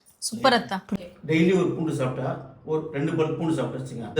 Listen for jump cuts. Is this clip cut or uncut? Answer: cut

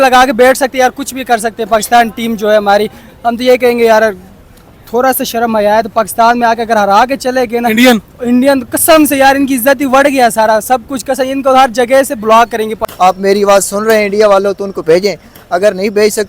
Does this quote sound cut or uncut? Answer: cut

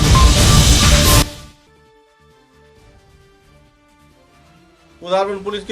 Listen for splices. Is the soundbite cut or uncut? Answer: cut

